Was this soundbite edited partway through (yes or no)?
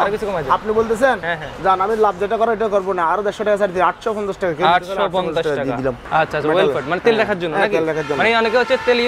yes